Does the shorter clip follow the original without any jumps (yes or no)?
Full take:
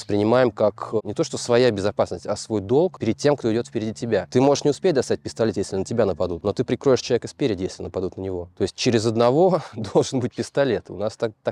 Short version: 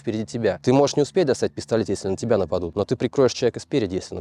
yes